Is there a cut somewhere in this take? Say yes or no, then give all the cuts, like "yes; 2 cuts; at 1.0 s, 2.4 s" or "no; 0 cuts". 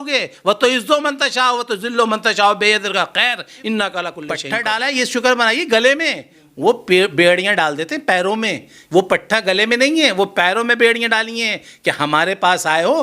yes; 1 cut; at 4.3 s